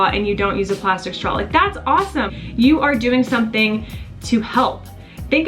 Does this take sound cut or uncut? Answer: uncut